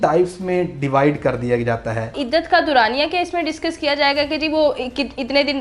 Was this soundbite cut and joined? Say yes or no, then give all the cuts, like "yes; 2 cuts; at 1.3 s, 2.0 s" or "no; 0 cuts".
yes; 1 cut; at 2.2 s